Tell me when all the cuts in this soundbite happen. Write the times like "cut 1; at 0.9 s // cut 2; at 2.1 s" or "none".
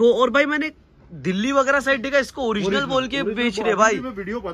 none